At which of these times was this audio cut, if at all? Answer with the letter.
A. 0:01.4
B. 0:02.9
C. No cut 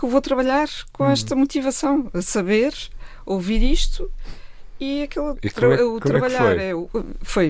C